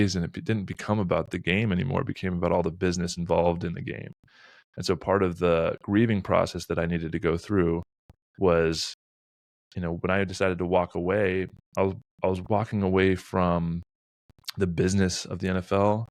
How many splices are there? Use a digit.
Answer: 0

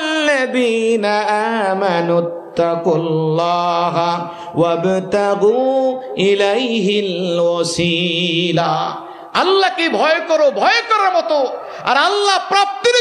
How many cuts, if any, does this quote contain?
0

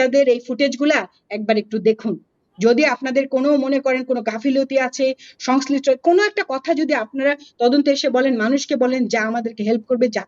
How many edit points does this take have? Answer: 0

